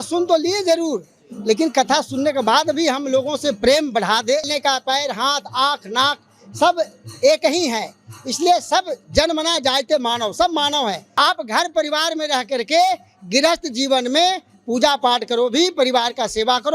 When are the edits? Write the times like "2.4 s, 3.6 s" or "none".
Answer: 4.5 s, 11.0 s